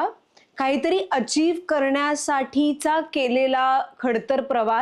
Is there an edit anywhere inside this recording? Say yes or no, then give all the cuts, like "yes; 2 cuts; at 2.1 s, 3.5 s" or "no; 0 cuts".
no; 0 cuts